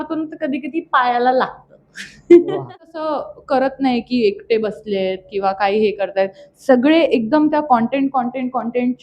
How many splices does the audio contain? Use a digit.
1